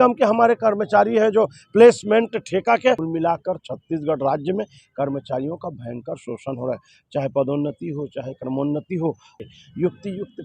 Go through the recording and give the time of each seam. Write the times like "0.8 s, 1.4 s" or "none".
3.0 s, 9.3 s